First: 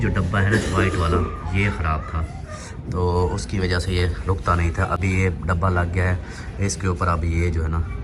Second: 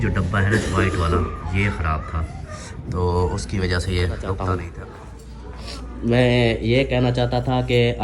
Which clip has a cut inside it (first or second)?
second